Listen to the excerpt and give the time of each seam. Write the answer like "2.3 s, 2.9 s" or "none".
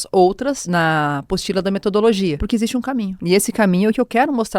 2.4 s